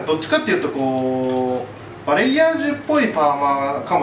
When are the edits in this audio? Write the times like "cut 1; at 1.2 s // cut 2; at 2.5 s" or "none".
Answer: none